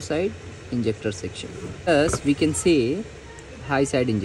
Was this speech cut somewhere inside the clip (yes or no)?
yes